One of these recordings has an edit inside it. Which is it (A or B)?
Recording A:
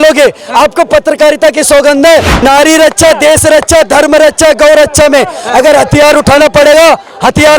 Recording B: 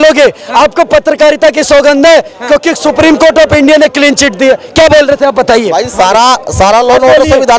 A